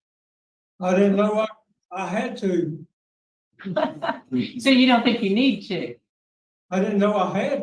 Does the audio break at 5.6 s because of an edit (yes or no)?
no